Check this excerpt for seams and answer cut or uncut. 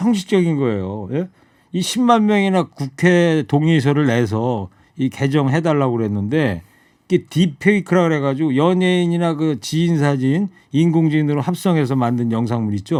uncut